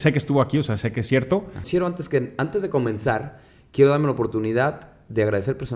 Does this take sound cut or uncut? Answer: cut